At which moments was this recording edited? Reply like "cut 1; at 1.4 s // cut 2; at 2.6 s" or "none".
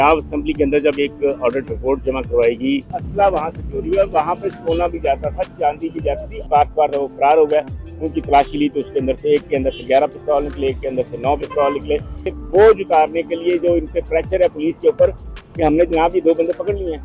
cut 1; at 3.0 s // cut 2; at 6.4 s // cut 3; at 12.4 s